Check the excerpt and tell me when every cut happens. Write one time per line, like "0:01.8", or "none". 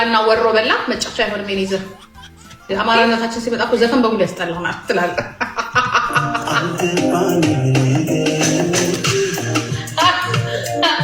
none